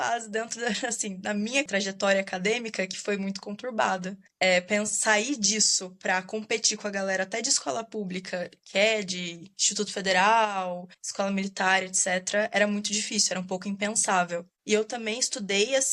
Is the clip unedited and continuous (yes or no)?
no